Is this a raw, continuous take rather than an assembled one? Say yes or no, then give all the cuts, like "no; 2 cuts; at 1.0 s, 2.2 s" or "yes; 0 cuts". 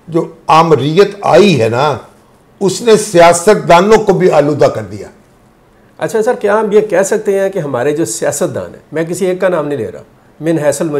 yes; 0 cuts